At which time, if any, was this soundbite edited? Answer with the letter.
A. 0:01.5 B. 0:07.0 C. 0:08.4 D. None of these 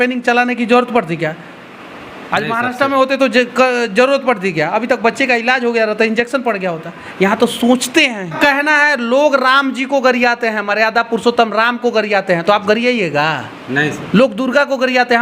C